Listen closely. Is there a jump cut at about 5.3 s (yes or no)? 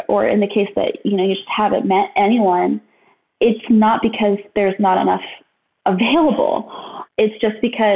no